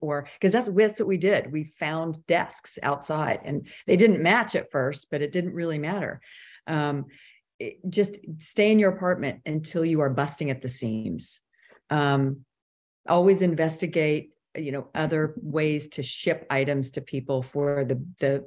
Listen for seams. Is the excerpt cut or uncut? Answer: uncut